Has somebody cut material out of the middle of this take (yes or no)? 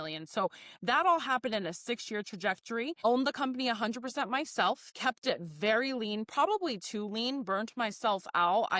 yes